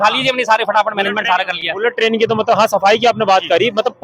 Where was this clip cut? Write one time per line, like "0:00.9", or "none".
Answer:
none